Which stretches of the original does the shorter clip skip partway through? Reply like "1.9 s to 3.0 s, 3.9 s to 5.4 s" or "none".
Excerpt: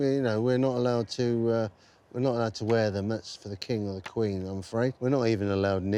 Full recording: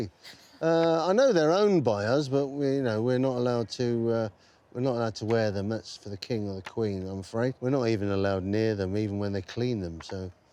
none